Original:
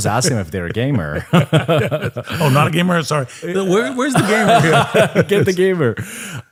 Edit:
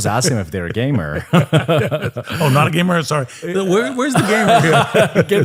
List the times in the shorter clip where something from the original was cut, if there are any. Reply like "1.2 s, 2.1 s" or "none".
none